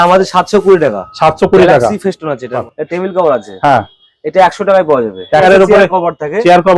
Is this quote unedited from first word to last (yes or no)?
no